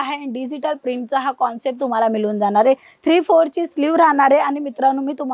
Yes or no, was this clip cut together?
no